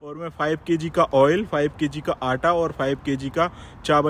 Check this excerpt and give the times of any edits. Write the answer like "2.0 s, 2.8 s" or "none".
none